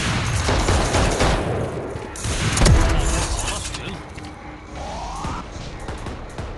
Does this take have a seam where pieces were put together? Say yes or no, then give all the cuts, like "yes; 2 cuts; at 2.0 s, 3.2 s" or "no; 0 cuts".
no; 0 cuts